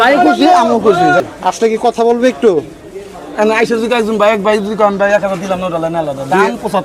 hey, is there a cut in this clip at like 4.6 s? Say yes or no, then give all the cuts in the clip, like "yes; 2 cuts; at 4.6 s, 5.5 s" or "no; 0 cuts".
no; 1 cut; at 1.2 s